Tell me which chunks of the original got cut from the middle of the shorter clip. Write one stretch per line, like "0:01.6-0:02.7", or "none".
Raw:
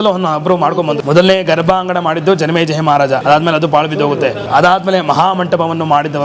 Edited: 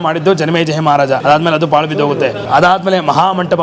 none